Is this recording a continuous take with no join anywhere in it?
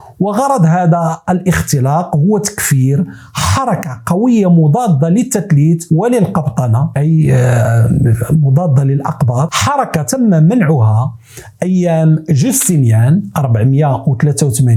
yes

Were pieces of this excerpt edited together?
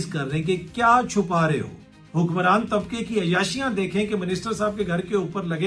yes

